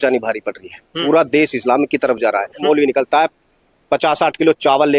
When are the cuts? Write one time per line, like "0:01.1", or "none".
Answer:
0:01.0
0:02.6